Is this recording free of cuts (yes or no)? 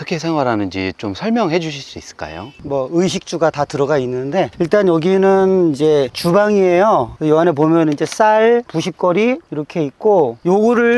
yes